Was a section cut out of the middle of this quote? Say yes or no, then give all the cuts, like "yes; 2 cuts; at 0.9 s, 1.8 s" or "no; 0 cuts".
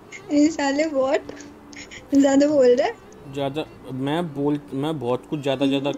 no; 0 cuts